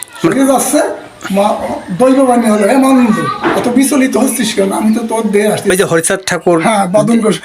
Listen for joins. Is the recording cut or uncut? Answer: cut